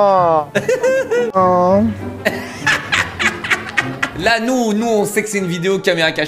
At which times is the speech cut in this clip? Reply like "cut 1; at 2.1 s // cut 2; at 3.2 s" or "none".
cut 1; at 1.4 s // cut 2; at 4.1 s